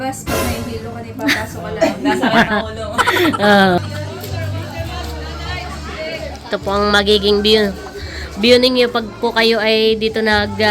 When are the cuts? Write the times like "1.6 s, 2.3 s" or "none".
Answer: 3.8 s

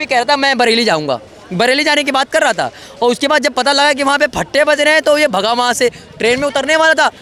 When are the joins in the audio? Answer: none

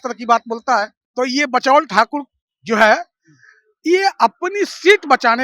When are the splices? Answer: 1.0 s

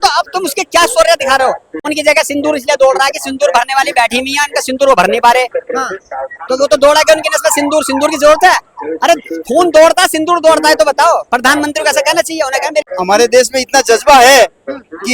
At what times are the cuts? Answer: 1.9 s, 12.8 s

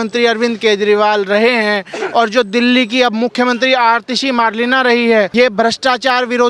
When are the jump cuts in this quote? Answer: 5.3 s

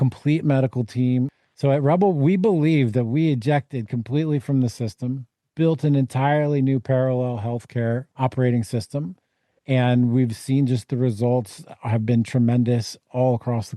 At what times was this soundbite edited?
1.4 s, 8.1 s

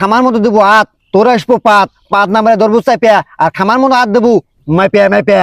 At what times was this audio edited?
none

